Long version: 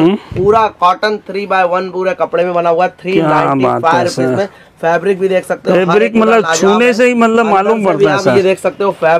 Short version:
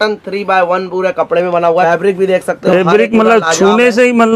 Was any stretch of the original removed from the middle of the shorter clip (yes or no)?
yes